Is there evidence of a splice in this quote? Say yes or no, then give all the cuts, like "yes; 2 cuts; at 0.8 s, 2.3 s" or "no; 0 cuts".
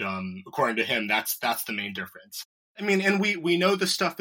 yes; 1 cut; at 2.7 s